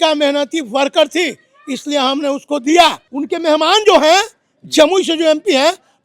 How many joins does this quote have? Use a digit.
1